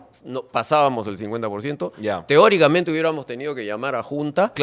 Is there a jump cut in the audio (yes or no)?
no